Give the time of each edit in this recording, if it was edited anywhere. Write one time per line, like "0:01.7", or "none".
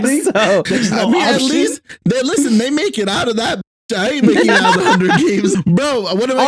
0:05.5